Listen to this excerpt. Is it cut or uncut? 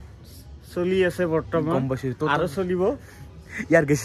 uncut